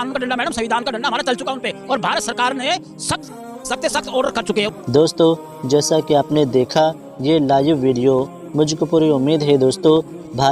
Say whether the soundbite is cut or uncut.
uncut